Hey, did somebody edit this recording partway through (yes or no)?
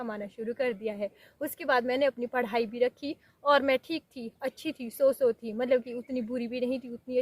no